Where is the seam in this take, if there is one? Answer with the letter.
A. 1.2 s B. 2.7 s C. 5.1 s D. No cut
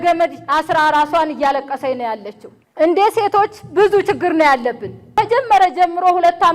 C